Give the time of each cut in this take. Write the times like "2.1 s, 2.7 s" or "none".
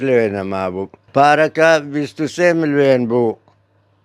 1.0 s